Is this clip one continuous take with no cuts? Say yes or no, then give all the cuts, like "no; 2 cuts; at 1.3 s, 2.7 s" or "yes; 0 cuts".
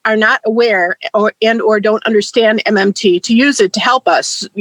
yes; 0 cuts